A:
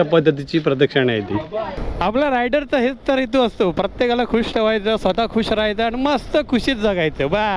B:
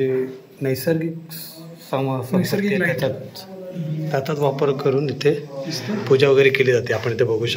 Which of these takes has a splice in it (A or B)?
A